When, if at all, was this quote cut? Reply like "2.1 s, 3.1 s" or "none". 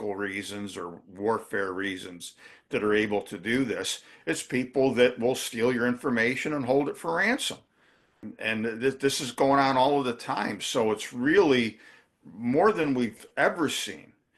8.3 s